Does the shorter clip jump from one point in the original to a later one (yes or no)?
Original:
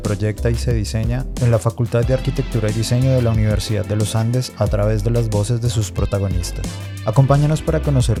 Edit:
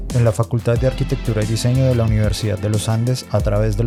no